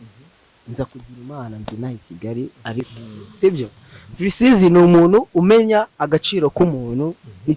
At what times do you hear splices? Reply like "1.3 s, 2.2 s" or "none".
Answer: 2.9 s